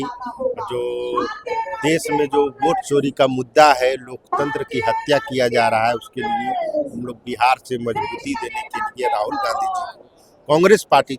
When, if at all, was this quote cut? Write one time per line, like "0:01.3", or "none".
none